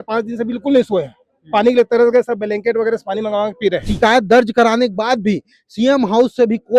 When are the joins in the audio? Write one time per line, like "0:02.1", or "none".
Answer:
0:03.9